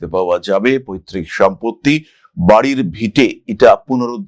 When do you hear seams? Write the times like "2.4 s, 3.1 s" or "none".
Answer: none